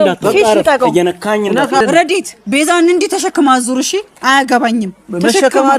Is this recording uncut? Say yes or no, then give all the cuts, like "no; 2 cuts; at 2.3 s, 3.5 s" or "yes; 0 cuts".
no; 1 cut; at 1.8 s